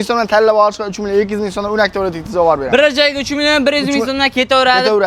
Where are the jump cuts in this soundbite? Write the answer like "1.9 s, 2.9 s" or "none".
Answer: none

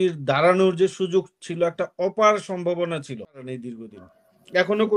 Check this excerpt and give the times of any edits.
3.5 s

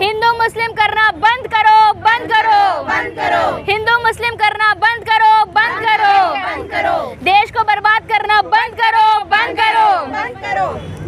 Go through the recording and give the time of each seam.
none

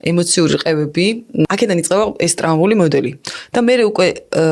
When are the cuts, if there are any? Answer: 1.4 s

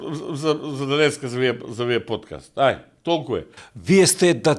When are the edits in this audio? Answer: 3.6 s

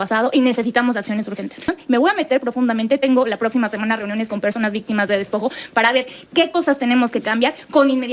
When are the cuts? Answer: 1.8 s

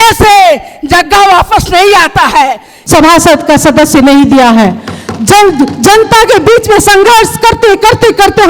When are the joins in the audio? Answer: 2.8 s

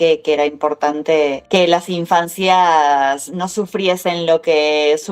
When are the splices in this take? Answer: 1.4 s

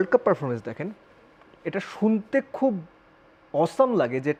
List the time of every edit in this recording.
none

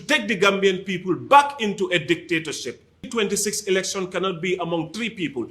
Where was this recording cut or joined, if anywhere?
3.0 s

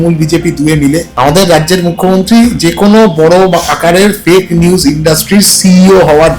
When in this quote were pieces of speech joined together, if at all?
1.1 s

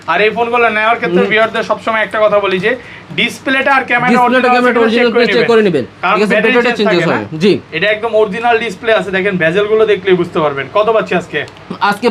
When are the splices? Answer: none

